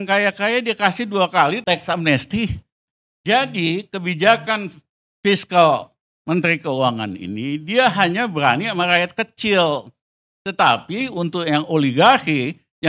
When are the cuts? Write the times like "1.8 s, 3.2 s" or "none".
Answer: 1.6 s, 2.9 s